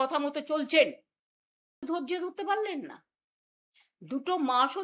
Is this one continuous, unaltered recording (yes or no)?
no